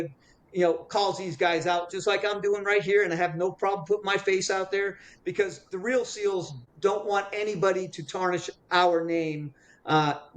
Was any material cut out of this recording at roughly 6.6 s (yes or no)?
yes